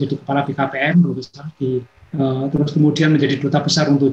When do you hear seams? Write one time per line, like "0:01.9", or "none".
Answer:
none

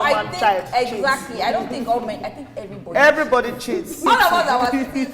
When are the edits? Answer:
0:04.0

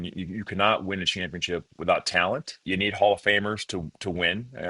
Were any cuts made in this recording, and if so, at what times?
0:02.6

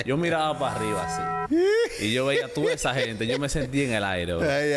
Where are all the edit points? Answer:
none

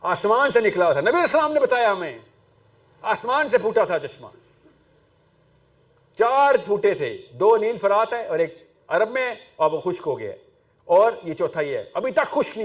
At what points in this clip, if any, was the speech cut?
none

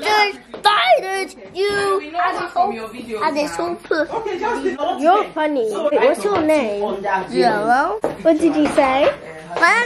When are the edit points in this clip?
0:04.8
0:05.9
0:08.0

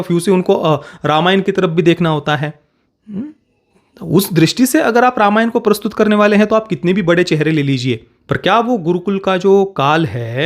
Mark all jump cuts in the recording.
0:08.1

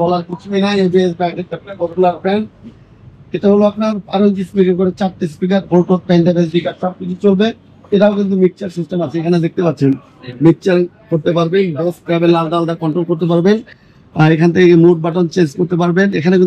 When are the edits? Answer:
none

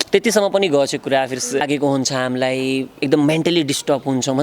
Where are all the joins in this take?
0:01.6

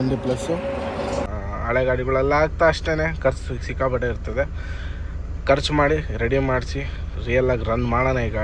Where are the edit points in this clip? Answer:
0:01.3

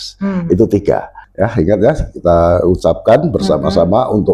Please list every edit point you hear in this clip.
0:01.2

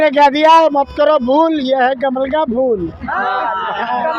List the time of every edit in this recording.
none

